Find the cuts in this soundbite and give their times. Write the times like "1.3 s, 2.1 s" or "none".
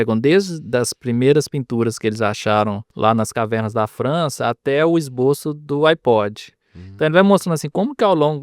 2.8 s

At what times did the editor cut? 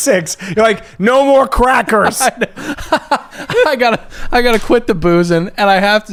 none

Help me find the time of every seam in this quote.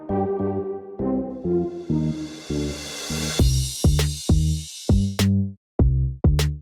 none

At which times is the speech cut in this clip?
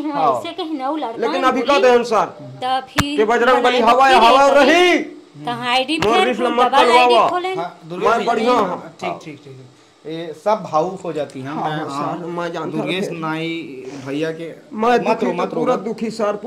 none

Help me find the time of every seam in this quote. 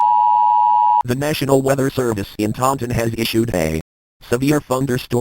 1.0 s

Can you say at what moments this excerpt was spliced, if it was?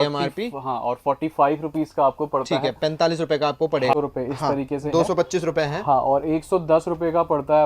3.9 s

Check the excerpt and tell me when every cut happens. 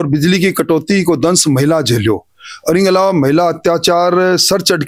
none

